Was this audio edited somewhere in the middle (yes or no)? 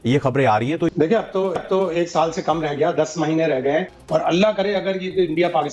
yes